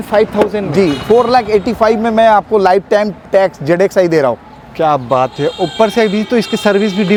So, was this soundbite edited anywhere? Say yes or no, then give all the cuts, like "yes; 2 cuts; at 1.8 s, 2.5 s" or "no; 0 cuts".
no; 0 cuts